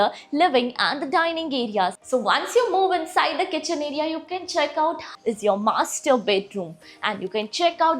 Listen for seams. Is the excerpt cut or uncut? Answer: cut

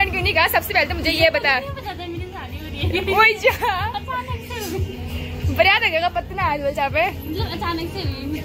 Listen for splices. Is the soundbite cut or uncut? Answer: uncut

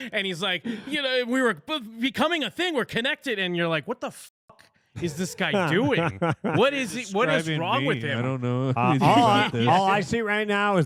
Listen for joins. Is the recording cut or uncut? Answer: uncut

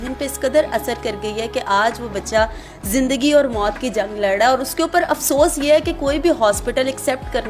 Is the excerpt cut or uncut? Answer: uncut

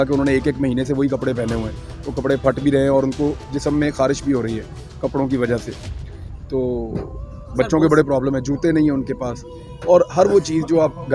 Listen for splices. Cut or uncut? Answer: uncut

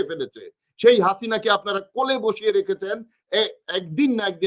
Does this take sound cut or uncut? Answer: uncut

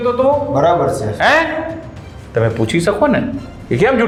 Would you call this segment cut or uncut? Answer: uncut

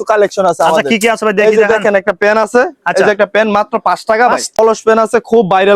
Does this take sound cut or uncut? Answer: cut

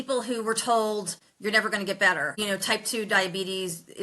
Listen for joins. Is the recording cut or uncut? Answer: cut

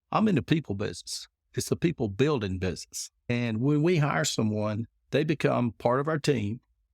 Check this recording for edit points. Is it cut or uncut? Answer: cut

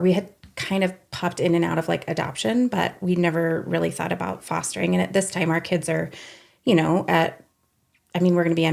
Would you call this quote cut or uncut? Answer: uncut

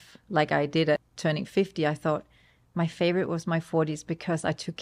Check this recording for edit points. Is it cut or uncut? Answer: cut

